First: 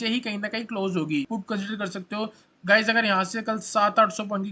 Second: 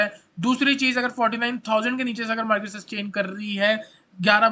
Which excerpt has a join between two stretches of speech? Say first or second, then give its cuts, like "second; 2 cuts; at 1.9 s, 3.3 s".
first; 1 cut; at 1.3 s